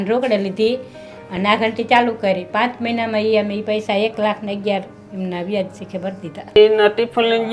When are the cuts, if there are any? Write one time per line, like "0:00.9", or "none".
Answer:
0:06.6

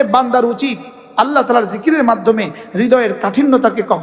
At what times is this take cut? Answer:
none

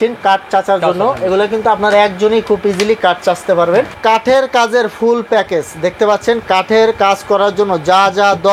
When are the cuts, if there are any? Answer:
0:04.0

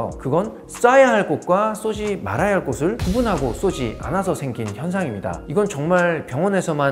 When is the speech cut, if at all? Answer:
0:05.4

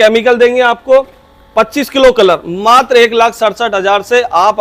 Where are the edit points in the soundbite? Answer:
none

